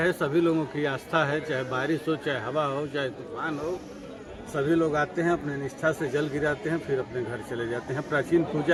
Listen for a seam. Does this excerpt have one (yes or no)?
no